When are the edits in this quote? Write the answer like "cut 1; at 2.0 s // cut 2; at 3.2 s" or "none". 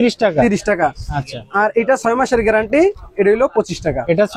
none